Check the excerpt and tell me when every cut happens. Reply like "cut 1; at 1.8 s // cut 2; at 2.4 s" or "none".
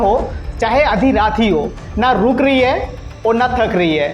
cut 1; at 1.8 s